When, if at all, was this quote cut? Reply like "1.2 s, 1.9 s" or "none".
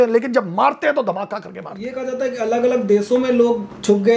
none